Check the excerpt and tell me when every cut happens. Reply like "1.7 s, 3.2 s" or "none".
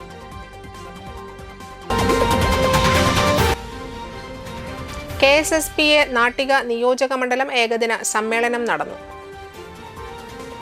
1.7 s